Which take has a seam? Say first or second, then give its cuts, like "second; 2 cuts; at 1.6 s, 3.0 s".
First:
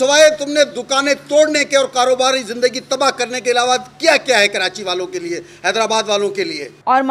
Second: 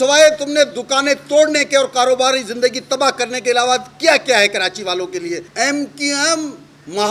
second; 1 cut; at 5.5 s